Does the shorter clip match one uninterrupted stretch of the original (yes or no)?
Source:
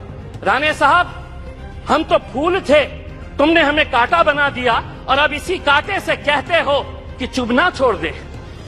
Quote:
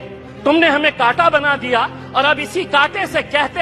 yes